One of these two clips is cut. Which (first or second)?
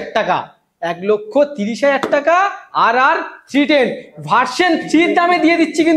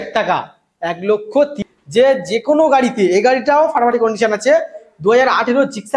second